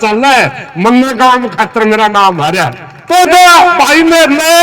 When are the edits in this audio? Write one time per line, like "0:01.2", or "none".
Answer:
0:03.3